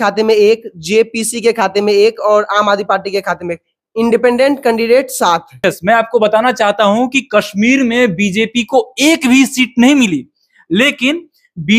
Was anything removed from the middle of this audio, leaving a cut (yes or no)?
yes